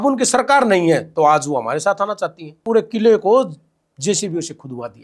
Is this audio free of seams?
no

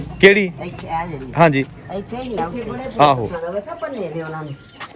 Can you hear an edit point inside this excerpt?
yes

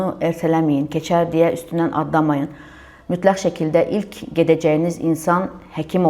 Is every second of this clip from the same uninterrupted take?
yes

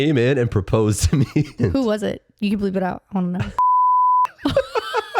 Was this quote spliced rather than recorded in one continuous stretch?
yes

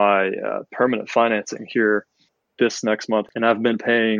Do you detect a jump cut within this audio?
yes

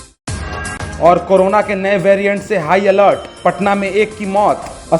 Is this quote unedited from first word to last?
no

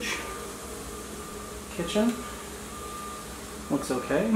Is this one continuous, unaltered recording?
yes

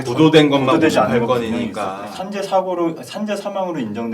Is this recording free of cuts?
no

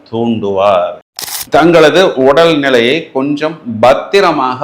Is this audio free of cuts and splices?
no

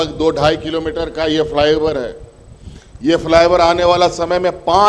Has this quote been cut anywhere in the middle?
no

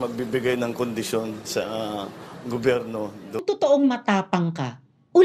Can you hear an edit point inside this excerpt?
yes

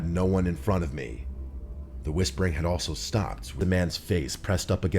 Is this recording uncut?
no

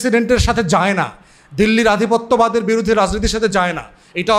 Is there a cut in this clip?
no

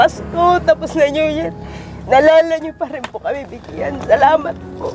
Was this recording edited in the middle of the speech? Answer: no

